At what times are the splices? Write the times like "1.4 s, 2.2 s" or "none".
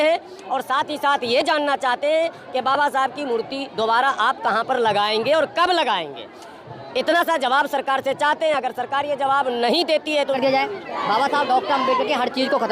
10.3 s